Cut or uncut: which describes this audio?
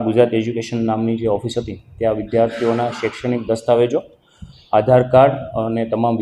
uncut